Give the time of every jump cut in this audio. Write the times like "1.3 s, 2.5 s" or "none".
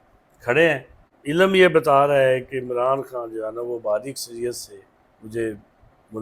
1.1 s